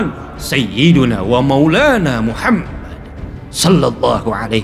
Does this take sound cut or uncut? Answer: uncut